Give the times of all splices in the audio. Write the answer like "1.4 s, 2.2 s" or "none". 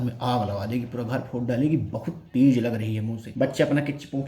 3.2 s